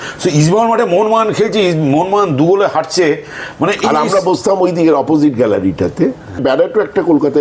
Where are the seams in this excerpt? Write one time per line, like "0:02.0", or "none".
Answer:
0:06.4